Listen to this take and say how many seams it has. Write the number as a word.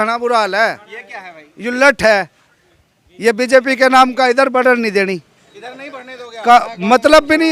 zero